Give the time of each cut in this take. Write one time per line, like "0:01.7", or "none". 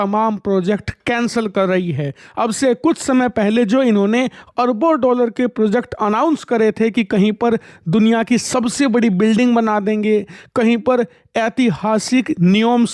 none